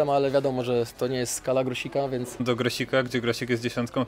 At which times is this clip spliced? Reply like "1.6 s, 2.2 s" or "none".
2.4 s